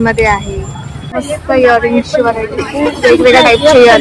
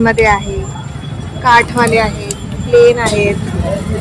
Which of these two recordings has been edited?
first; 1 cut; at 1.2 s

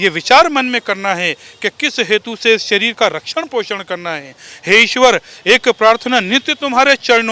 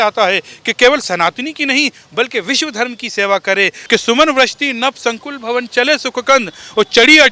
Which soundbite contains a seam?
second; 1 cut; at 3.8 s

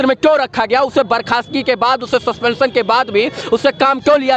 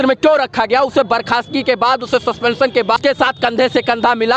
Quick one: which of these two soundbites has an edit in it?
second; 1 cut; at 3.0 s

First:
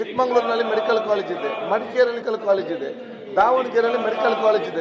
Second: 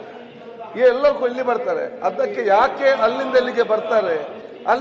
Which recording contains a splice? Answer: first; 1 cut; at 2.2 s

